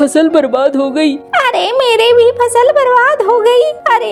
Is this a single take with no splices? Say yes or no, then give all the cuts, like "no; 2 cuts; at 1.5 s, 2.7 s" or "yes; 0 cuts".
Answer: yes; 0 cuts